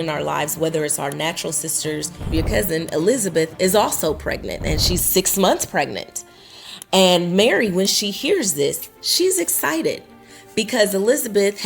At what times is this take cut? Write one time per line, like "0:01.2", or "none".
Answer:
0:02.3